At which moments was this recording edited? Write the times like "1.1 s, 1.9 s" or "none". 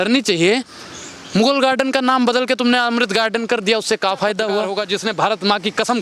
4.7 s